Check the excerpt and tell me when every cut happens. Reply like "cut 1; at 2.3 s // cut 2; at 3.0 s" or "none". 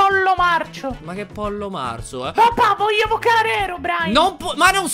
none